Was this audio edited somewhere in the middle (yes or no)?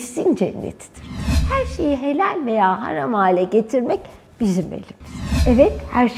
yes